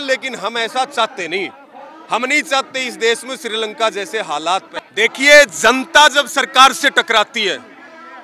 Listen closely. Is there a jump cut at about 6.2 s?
no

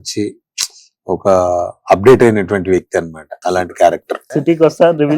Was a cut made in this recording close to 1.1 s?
no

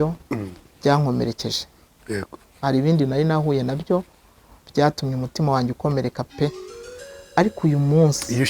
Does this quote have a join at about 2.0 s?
no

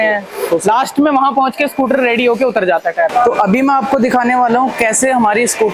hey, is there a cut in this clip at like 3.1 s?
no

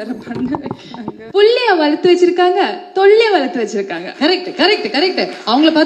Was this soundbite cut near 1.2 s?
yes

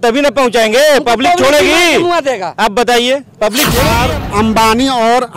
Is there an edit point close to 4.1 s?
yes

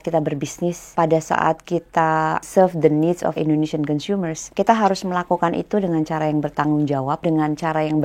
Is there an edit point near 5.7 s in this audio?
no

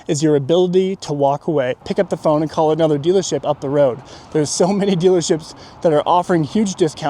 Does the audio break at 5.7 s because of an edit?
no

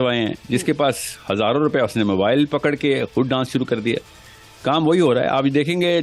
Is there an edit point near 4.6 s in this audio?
no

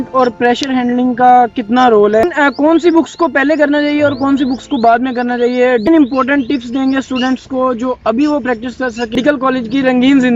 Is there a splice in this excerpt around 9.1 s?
yes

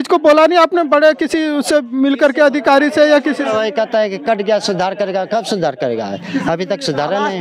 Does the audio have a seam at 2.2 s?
no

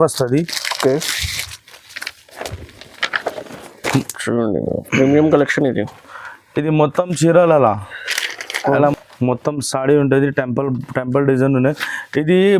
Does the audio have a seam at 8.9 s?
yes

